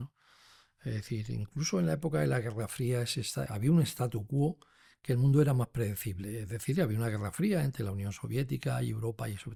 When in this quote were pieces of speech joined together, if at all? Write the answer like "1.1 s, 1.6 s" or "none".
none